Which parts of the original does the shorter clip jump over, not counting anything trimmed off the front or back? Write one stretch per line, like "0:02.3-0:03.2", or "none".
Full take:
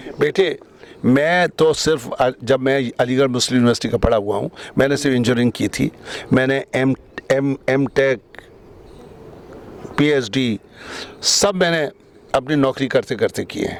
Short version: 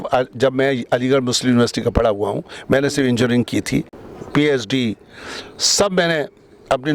0:06.1-0:09.6